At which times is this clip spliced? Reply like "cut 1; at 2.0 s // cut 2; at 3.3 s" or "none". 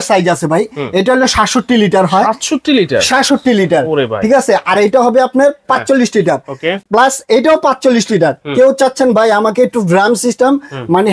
none